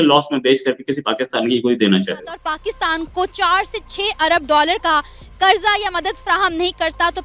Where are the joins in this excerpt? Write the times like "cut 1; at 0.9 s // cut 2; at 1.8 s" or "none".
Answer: cut 1; at 2.3 s

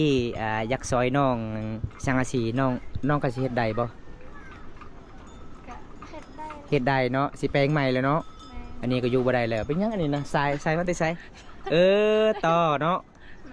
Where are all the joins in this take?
none

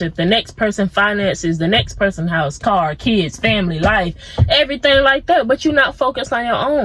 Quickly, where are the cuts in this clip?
none

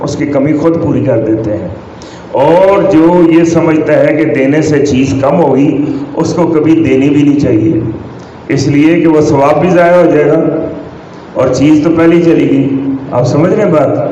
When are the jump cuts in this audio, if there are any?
none

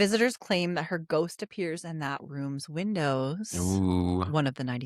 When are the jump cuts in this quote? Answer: none

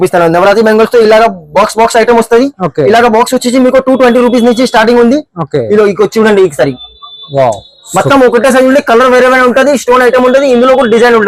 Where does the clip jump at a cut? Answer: none

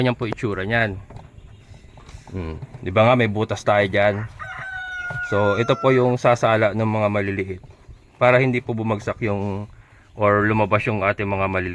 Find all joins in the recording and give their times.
none

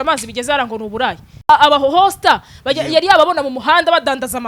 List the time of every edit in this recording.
none

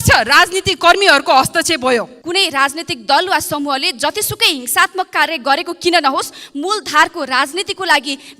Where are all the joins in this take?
cut 1; at 2.2 s

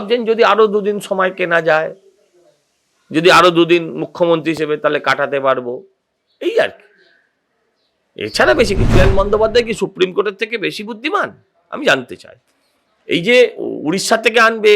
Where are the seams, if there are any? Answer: cut 1; at 9.0 s

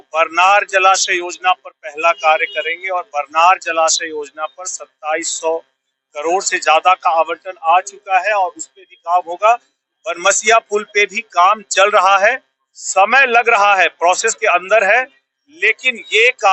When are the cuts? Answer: none

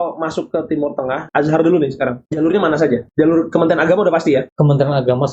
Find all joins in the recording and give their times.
cut 1; at 1.2 s // cut 2; at 2.3 s // cut 3; at 3.1 s // cut 4; at 4.5 s

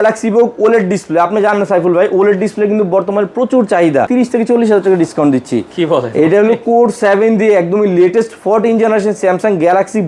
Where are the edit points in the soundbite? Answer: cut 1; at 4.1 s

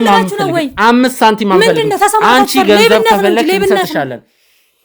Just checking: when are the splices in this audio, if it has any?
none

